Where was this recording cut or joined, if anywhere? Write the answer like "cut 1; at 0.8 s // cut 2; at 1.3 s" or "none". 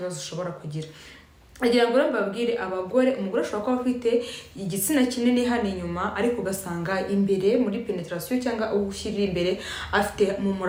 none